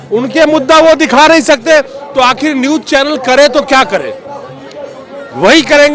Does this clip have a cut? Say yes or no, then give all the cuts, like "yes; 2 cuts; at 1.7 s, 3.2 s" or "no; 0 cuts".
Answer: no; 0 cuts